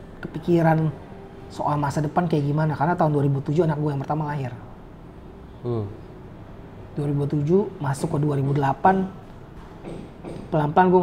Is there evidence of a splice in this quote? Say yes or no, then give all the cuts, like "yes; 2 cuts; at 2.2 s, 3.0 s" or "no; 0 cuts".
no; 0 cuts